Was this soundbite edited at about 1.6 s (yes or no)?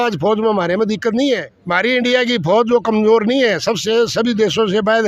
yes